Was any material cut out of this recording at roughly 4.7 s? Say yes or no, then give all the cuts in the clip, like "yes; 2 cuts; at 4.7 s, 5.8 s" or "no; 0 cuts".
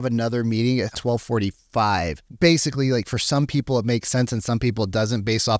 no; 2 cuts; at 1.0 s, 2.2 s